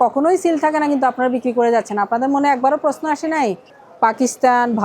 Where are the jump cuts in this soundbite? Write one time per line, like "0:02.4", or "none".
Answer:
0:03.8